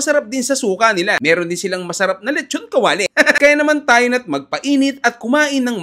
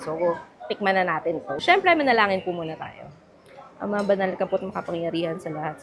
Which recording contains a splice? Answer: second; 1 cut; at 1.6 s

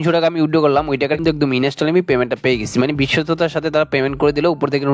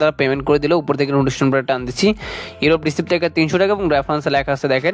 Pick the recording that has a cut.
first; 1 cut; at 1.1 s

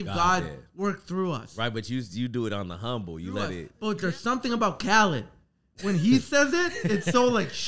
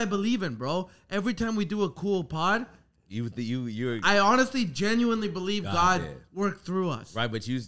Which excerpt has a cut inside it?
first; 1 cut; at 3.7 s

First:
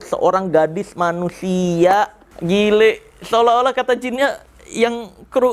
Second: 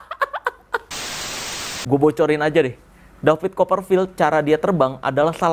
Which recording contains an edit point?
second; 1 cut; at 1.5 s

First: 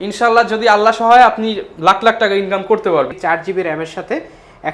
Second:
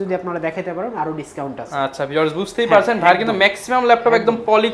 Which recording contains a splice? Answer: first; 1 cut; at 3.2 s

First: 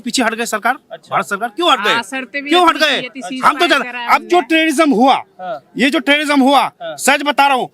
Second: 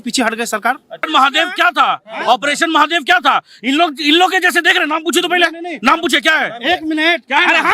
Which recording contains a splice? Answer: second; 1 cut; at 1.0 s

